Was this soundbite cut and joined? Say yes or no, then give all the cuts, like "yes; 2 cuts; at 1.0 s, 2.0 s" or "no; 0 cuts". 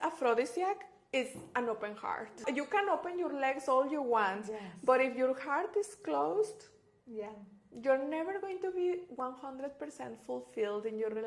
no; 0 cuts